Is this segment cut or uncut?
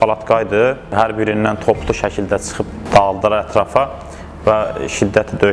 cut